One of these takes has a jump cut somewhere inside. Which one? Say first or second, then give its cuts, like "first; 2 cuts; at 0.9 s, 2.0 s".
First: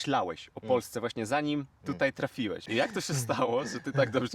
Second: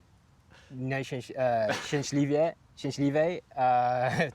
first; 1 cut; at 2.7 s